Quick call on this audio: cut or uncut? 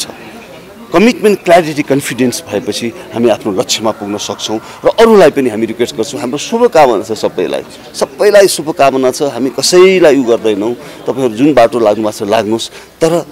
uncut